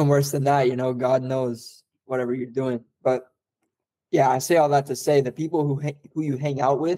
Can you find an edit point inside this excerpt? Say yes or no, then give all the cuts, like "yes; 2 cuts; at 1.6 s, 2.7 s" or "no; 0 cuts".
no; 0 cuts